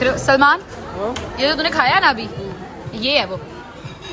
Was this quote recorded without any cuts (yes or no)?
yes